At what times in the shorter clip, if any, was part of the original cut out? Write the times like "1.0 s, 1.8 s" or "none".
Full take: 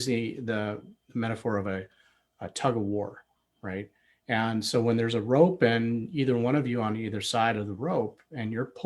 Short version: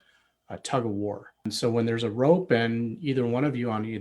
1.5 s